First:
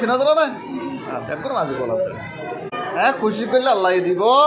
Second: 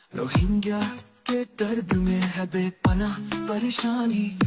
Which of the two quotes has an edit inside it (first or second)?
first